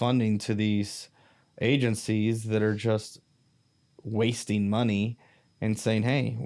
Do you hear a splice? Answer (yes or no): no